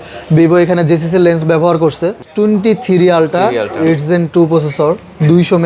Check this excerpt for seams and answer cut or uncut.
cut